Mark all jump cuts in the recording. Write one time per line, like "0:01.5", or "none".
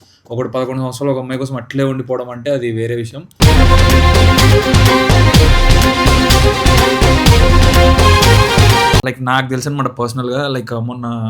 0:09.1